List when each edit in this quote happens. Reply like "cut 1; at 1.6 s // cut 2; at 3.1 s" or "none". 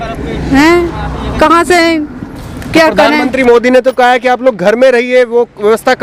none